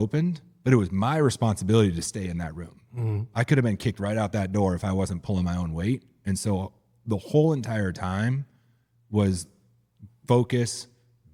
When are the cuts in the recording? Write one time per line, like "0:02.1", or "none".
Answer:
none